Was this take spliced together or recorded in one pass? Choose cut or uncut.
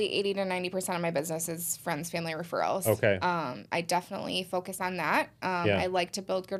uncut